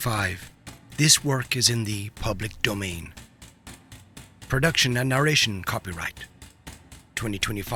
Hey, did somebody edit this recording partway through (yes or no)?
no